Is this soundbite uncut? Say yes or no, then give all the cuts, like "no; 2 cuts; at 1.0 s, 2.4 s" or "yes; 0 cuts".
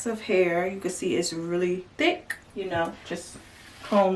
yes; 0 cuts